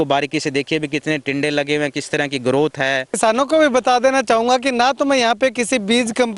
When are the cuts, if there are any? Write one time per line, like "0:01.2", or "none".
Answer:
0:03.2